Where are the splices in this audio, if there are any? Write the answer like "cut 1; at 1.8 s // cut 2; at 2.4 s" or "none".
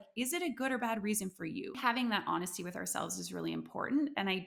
cut 1; at 1.8 s